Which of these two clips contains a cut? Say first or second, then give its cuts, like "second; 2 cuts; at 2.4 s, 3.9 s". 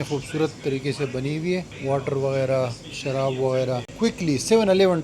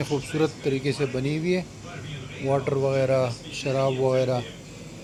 first; 2 cuts; at 1.7 s, 3.9 s